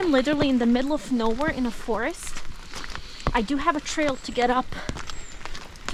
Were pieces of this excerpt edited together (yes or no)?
no